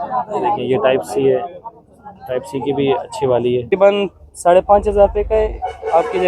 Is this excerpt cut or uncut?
cut